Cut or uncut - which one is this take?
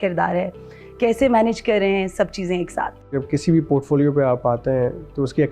cut